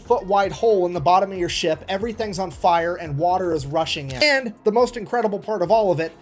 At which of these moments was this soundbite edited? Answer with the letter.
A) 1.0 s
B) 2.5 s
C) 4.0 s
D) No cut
C